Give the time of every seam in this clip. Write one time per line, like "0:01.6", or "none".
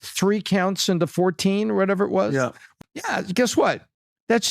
0:02.6